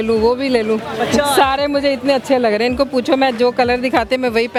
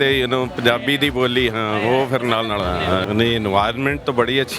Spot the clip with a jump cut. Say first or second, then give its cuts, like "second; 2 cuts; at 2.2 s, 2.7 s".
second; 1 cut; at 3.0 s